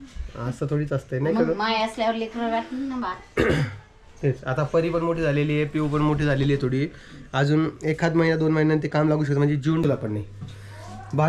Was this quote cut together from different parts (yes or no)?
yes